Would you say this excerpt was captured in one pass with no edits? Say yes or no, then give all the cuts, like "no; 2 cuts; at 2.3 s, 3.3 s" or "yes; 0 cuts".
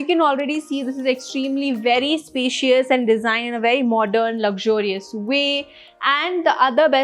yes; 0 cuts